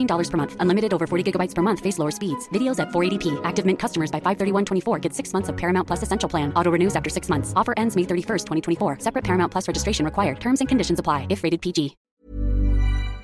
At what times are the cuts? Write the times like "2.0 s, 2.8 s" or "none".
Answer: 12.1 s